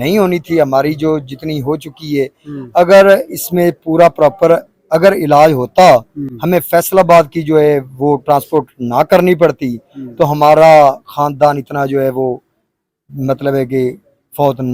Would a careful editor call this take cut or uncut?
uncut